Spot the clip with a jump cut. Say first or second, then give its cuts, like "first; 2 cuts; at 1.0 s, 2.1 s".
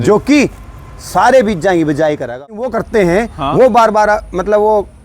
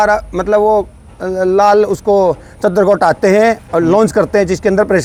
first; 1 cut; at 2.8 s